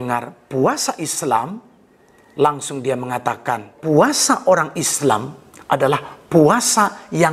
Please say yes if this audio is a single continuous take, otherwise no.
no